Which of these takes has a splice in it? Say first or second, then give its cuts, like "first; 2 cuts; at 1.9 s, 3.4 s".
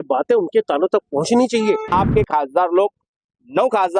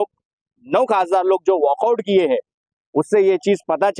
first; 1 cut; at 1.9 s